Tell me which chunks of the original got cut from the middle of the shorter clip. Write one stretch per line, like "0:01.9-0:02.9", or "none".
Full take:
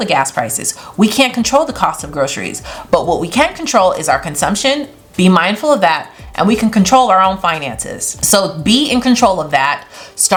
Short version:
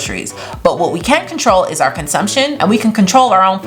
0:04.8-0:06.3